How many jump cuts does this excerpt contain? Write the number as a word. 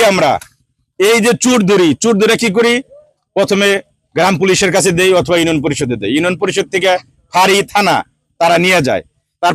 zero